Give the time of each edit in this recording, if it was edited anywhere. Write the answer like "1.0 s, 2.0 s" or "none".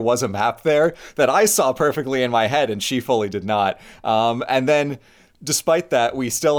none